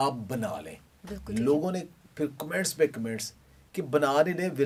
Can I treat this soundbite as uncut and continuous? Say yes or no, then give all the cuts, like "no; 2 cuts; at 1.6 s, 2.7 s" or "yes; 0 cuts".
yes; 0 cuts